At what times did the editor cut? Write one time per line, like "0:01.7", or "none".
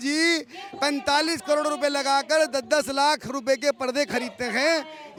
none